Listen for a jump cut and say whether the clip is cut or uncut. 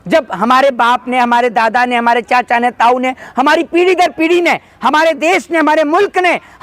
uncut